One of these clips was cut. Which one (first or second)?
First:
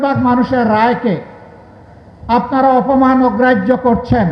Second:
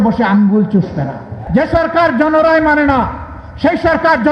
second